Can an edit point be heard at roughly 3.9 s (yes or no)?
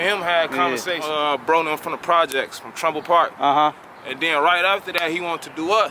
no